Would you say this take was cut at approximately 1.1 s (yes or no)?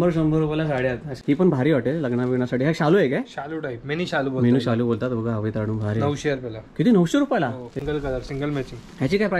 yes